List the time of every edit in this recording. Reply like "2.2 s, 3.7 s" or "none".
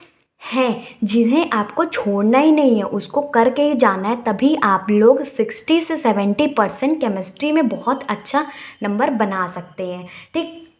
none